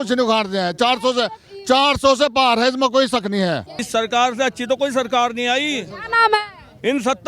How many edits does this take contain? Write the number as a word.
one